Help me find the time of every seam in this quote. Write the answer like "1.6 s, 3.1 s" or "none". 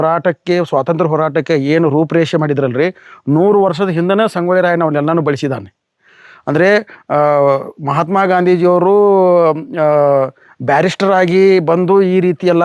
none

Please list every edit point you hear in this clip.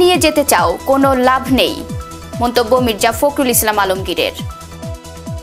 none

